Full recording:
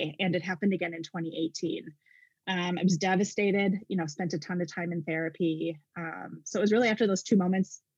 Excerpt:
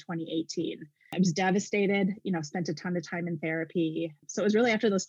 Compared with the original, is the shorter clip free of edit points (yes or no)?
no